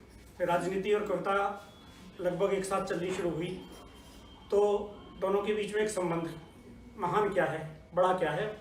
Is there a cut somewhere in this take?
no; 0 cuts

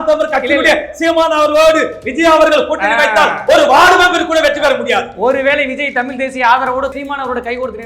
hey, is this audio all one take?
no; 1 cut; at 6.9 s

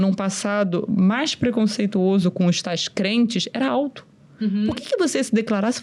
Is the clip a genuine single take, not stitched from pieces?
yes; 0 cuts

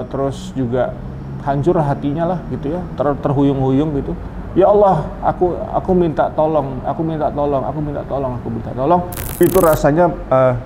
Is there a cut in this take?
yes; 1 cut; at 9.2 s

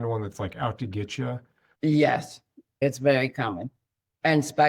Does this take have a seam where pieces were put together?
yes; 1 cut; at 1.6 s

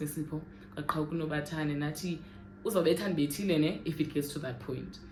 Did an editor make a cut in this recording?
no; 0 cuts

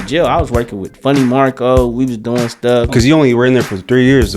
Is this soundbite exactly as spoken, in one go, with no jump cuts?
no; 1 cut; at 2.8 s

